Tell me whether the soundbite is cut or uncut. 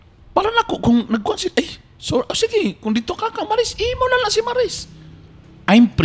uncut